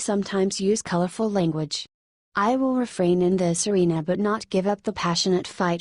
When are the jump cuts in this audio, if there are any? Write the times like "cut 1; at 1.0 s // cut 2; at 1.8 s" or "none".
cut 1; at 2.0 s

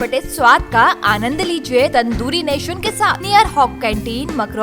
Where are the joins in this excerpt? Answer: cut 1; at 1.9 s // cut 2; at 3.2 s

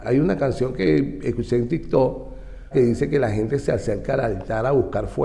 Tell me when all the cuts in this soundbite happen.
cut 1; at 2.7 s

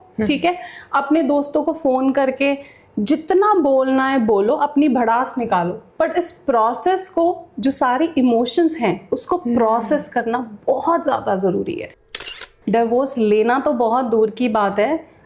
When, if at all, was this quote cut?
cut 1; at 12.2 s

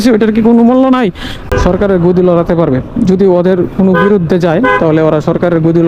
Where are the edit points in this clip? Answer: cut 1; at 1.4 s

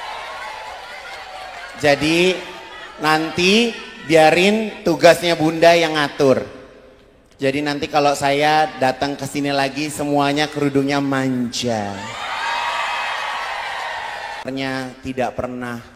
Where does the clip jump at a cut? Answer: cut 1; at 14.5 s

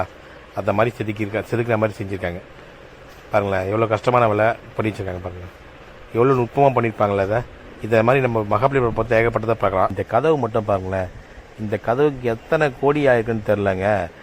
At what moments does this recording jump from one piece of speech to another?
cut 1; at 10.0 s

